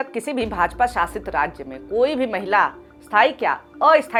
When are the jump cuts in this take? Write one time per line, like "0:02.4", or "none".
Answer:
none